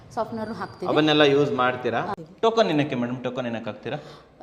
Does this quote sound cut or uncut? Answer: cut